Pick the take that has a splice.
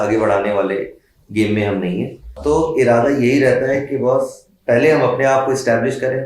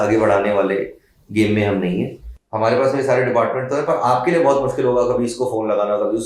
second; 1 cut; at 2.2 s

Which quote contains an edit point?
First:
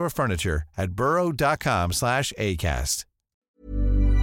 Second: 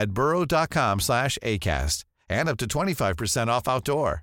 first; 1 cut; at 3.3 s

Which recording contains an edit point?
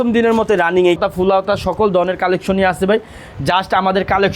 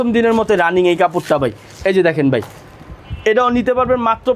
first; 1 cut; at 1.0 s

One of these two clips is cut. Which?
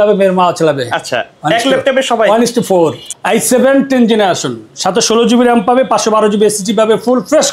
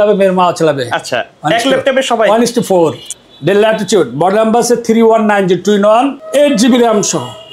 first; 1 cut; at 3.1 s

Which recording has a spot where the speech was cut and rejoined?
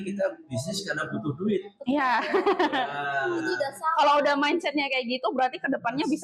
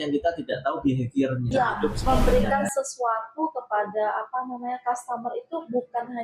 second; 1 cut; at 1.5 s

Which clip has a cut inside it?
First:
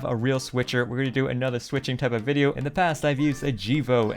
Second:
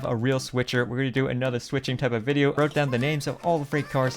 second; 1 cut; at 2.6 s

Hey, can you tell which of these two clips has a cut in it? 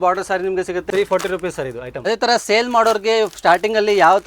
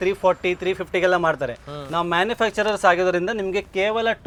first; 2 cuts; at 0.9 s, 2.0 s

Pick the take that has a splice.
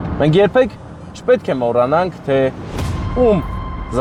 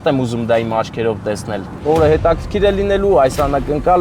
second; 1 cut; at 1.8 s

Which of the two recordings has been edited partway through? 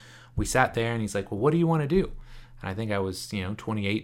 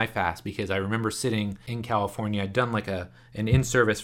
second; 1 cut; at 1.7 s

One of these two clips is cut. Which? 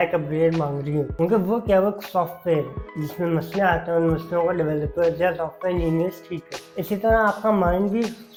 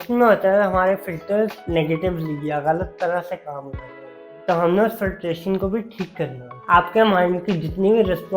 second; 1 cut; at 6.5 s

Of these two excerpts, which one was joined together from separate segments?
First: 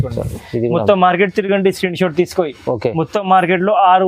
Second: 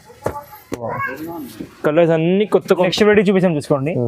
second; 1 cut; at 2.9 s

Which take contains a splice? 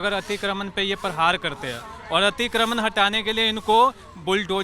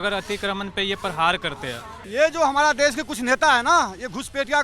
second; 1 cut; at 1.9 s

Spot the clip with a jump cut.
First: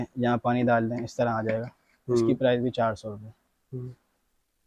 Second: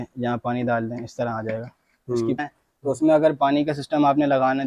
second; 1 cut; at 2.4 s

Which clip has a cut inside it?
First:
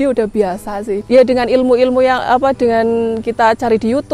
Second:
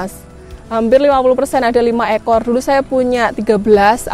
first; 1 cut; at 0.9 s

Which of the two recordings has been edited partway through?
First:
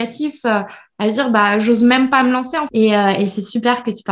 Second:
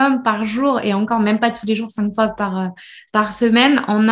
first; 1 cut; at 2.6 s

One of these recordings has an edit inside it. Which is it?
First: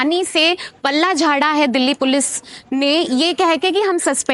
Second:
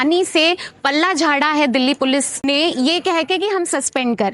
second; 1 cut; at 2.3 s

